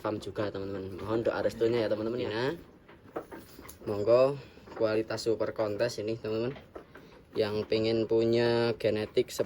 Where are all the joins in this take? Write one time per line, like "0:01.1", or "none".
0:02.2